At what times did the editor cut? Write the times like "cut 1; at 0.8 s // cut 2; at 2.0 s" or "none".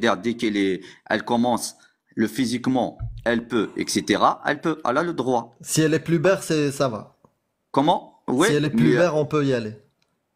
none